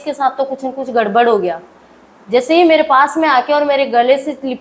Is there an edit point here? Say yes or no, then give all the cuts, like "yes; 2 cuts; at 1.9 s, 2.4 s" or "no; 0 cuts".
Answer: no; 0 cuts